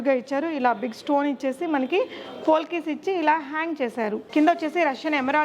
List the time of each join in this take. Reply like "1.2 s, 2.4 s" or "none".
4.2 s